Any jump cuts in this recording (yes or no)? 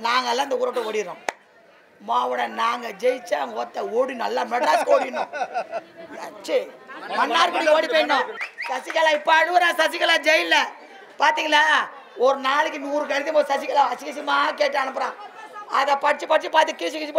yes